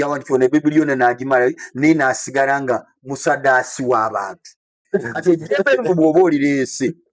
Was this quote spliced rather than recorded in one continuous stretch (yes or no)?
yes